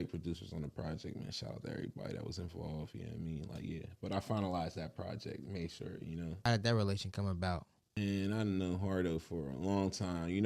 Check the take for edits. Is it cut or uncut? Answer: cut